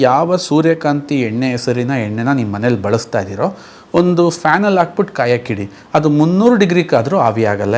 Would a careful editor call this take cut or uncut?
uncut